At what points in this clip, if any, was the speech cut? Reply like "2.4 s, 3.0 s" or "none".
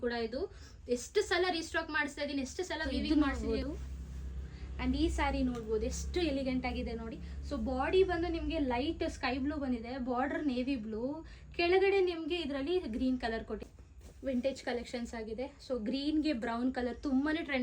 2.8 s, 13.8 s